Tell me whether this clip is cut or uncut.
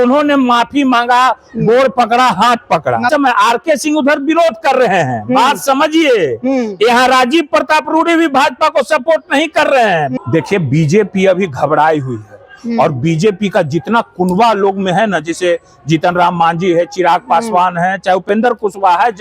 cut